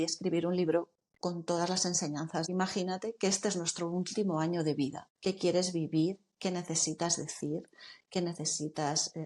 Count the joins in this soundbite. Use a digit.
2